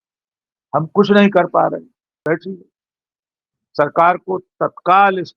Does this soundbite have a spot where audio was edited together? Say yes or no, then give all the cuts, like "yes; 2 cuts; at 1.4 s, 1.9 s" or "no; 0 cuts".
yes; 1 cut; at 2.2 s